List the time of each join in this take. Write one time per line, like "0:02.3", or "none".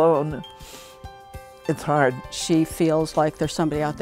0:02.2

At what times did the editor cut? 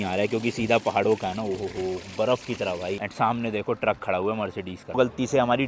0:03.1
0:05.0

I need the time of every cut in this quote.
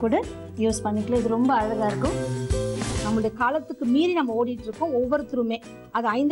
0:02.6

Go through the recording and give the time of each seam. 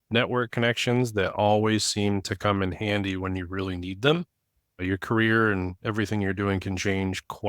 0:04.8

